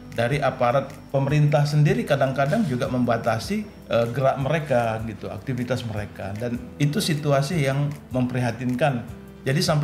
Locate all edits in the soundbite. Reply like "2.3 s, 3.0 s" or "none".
3.7 s, 6.7 s